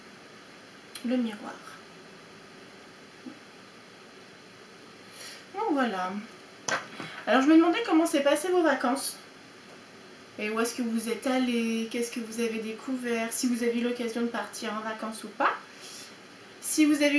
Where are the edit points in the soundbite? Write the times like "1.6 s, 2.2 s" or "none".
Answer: none